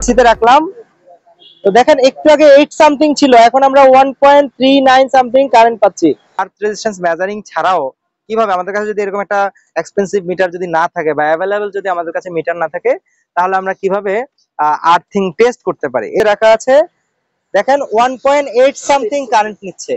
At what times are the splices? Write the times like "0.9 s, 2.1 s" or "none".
6.4 s, 16.2 s